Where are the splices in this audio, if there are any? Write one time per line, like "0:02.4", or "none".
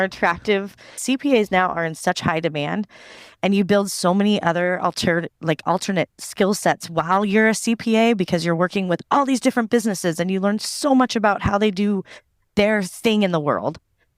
0:01.0